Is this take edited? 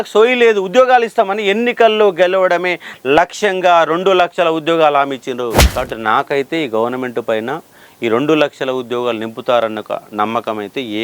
yes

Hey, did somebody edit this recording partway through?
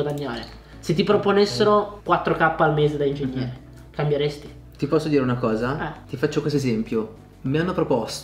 no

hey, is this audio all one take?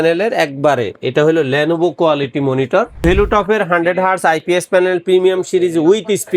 no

